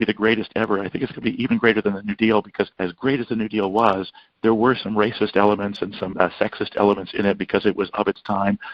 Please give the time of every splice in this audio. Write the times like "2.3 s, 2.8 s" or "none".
2.8 s, 6.1 s